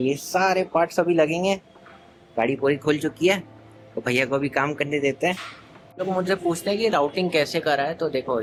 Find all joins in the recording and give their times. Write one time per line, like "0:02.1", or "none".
none